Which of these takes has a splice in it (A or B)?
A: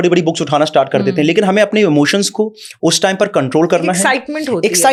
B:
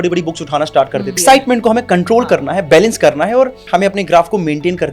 B